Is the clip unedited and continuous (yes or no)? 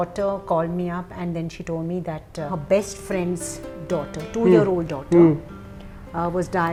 yes